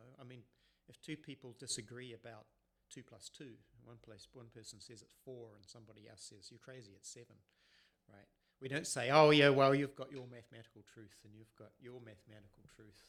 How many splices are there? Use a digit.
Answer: 0